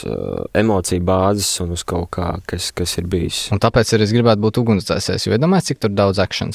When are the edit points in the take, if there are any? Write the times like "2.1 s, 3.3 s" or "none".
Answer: 3.4 s